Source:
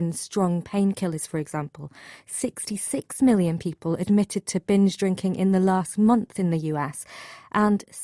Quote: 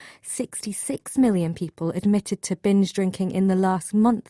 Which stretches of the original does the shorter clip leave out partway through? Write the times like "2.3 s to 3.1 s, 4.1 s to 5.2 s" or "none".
none